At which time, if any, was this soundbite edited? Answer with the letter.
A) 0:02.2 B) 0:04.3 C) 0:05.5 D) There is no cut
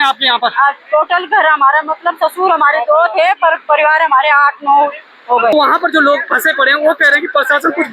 C